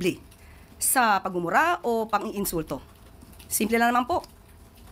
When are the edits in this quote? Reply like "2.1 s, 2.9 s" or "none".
none

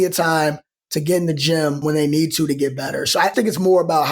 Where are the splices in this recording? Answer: 1.8 s, 3.3 s

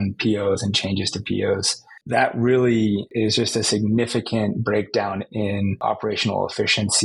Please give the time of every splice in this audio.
1.9 s, 3.1 s, 5.8 s

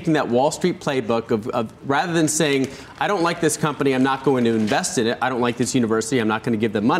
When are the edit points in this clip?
none

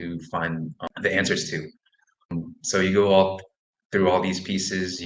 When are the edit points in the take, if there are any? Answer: 0.8 s, 2.3 s

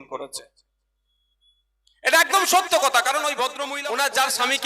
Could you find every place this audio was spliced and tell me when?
3.7 s

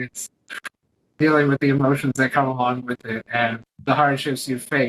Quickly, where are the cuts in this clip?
3.7 s

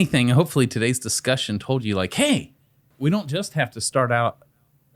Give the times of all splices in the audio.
2.8 s

